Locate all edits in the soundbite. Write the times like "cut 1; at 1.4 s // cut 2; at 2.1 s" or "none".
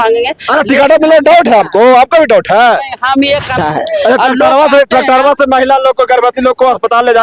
cut 1; at 3.6 s